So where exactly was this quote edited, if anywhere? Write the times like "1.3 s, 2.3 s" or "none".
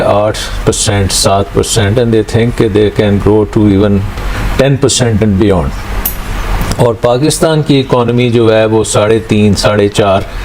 none